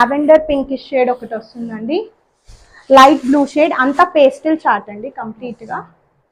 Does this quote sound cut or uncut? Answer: uncut